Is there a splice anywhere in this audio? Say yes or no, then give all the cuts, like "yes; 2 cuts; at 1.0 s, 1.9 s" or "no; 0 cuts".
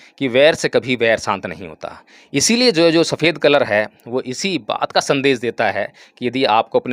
no; 0 cuts